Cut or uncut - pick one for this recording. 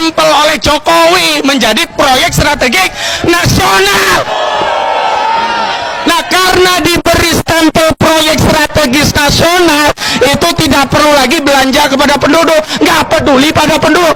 uncut